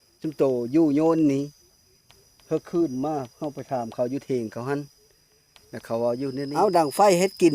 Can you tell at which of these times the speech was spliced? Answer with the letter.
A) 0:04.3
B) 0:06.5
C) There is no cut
B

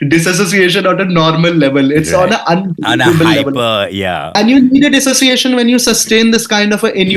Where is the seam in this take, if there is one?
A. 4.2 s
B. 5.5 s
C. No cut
A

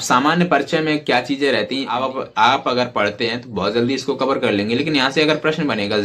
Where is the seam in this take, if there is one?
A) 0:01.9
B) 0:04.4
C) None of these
A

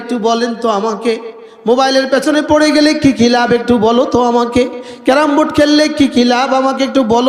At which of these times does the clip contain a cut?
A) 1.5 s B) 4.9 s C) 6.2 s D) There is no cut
D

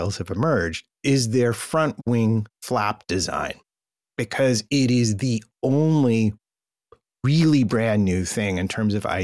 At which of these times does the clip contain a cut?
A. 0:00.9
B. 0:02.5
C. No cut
A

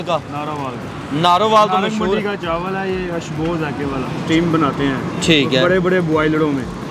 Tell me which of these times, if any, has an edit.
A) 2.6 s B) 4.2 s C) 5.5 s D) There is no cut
B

